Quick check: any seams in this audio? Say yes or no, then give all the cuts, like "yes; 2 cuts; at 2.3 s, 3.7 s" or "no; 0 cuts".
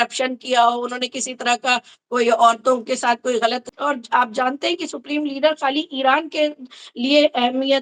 yes; 1 cut; at 3.7 s